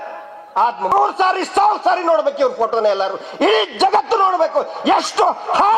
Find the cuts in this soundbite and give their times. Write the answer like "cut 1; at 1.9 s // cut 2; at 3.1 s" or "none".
cut 1; at 0.9 s